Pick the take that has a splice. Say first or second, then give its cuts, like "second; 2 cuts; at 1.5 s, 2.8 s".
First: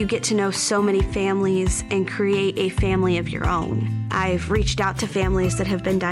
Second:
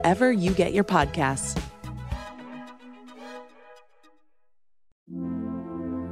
second; 1 cut; at 4.9 s